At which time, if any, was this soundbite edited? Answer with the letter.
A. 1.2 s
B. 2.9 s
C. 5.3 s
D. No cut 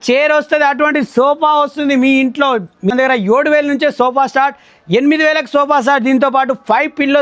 B